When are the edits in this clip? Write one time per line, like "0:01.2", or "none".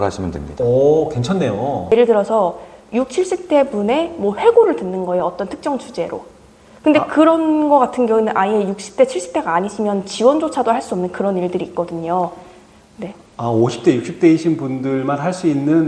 0:01.9